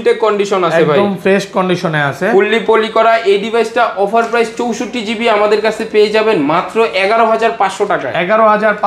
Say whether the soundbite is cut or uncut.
uncut